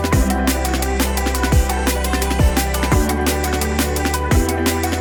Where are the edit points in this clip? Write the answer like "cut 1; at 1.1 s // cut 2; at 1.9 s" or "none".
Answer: none